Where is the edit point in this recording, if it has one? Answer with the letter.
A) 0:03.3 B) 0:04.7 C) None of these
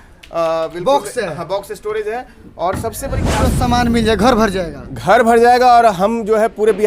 A